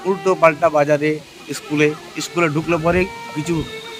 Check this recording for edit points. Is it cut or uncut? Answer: uncut